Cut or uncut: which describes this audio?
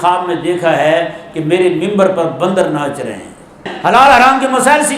cut